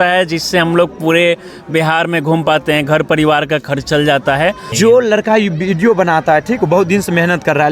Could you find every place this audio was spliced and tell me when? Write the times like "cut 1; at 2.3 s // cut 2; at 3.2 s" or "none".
cut 1; at 4.7 s